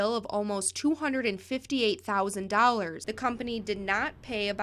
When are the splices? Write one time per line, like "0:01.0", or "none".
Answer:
0:03.0

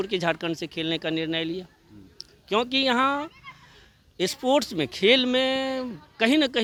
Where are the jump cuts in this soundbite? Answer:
none

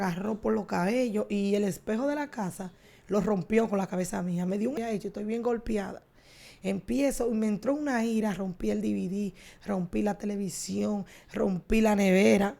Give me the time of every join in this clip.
0:04.8

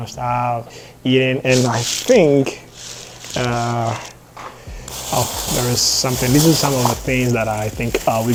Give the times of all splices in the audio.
none

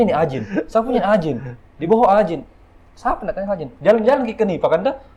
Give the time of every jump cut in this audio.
none

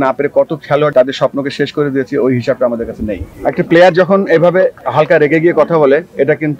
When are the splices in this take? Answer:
0:00.9
0:03.3
0:04.8

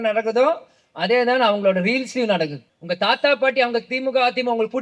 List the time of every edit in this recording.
0:02.7

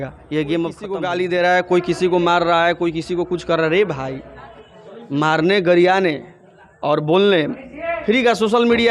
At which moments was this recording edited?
0:00.9

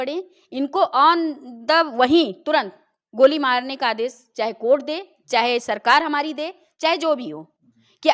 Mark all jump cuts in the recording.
none

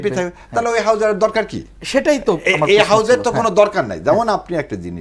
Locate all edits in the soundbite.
none

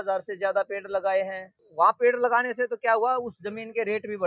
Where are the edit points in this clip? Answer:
0:01.6

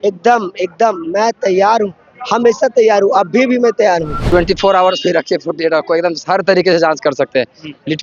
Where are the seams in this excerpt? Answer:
0:04.2

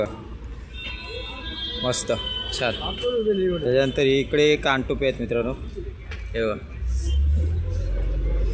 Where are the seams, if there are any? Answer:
none

